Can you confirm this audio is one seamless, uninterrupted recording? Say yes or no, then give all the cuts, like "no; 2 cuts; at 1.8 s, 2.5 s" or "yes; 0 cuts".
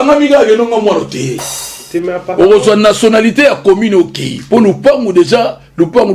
yes; 0 cuts